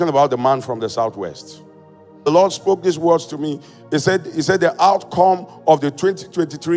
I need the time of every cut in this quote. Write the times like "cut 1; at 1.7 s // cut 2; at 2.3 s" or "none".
cut 1; at 2.3 s